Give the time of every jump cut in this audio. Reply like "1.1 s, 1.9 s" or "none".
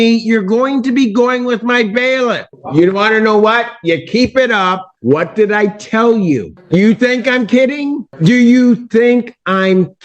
2.5 s, 4.9 s, 6.5 s, 8.1 s